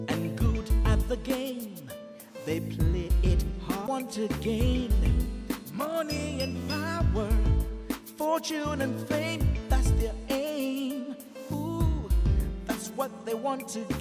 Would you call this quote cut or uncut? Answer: cut